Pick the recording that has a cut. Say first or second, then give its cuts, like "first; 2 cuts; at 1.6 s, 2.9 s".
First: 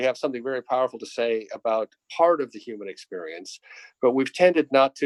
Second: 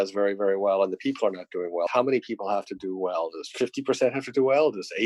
second; 1 cut; at 1.9 s